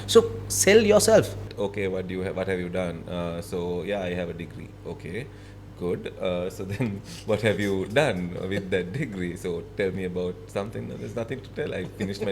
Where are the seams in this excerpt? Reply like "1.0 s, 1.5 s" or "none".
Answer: 1.5 s